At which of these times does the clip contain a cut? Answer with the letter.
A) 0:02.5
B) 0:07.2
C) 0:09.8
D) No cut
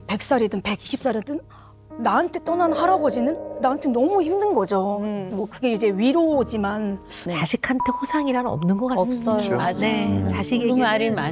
B